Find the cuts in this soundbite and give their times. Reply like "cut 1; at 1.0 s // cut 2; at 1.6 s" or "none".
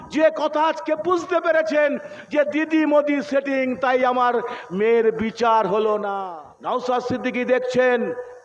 cut 1; at 6.2 s